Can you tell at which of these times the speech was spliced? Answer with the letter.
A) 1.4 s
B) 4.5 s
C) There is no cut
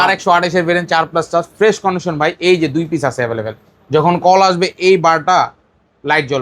C